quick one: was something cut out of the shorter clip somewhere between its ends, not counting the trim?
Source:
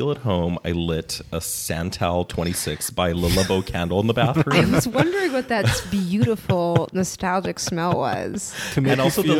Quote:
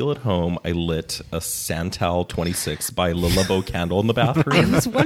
no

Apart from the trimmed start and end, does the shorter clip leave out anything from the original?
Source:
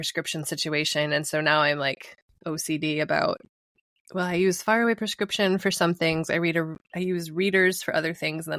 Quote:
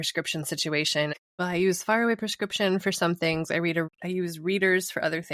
yes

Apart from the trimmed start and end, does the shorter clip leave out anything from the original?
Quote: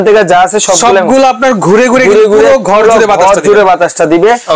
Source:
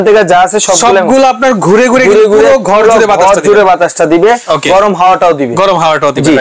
no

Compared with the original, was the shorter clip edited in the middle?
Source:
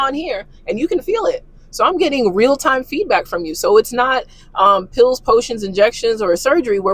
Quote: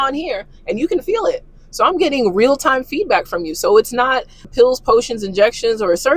yes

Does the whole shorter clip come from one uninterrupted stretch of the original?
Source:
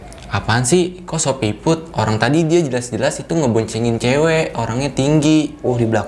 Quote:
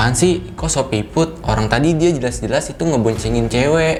yes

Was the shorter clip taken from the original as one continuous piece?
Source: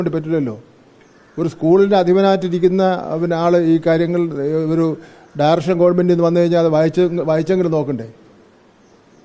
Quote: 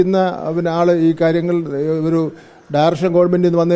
yes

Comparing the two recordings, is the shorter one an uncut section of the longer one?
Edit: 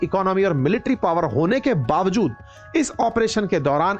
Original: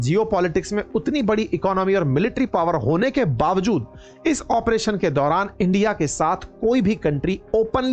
yes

